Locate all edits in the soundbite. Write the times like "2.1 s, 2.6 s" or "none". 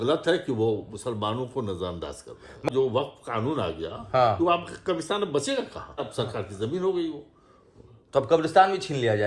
2.7 s, 6.1 s